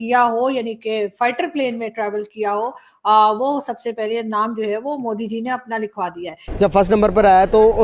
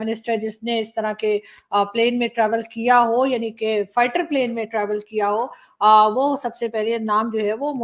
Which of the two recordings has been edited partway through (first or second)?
first